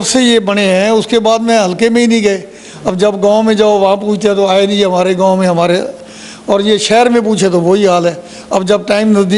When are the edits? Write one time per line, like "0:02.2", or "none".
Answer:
none